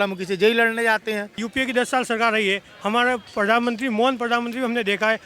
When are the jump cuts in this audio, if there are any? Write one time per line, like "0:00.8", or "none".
0:01.4